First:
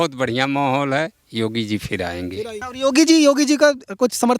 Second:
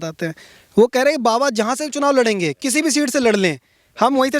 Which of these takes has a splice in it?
first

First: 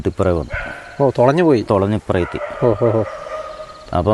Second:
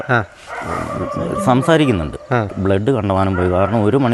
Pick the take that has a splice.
second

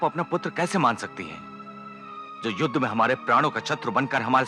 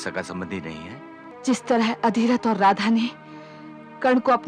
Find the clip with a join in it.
second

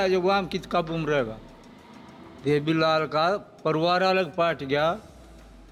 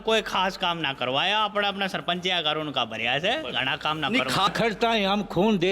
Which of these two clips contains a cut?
second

